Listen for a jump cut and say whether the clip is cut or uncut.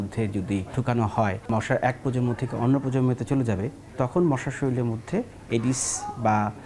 cut